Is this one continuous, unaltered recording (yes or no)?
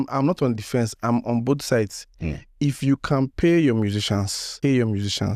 no